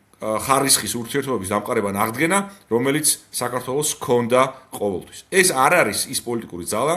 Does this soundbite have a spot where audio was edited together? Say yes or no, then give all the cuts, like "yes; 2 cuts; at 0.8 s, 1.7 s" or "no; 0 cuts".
no; 0 cuts